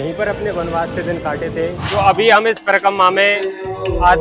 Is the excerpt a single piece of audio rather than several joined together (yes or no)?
no